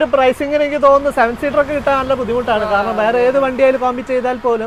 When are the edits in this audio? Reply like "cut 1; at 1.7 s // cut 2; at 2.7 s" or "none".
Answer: none